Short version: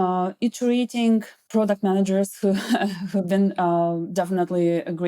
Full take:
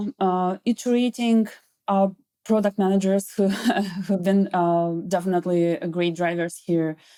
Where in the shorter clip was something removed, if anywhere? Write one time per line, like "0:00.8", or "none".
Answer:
0:01.4